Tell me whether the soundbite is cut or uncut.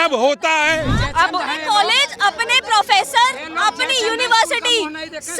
cut